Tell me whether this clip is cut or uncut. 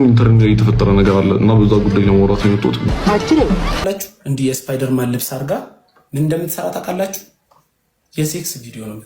cut